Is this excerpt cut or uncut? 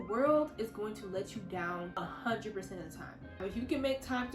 cut